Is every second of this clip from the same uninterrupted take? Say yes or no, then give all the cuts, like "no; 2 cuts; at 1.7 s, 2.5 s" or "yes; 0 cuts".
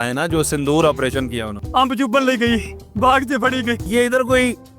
no; 3 cuts; at 1.5 s, 2.8 s, 3.8 s